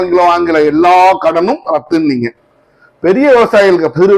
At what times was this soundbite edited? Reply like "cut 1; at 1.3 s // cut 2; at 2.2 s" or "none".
none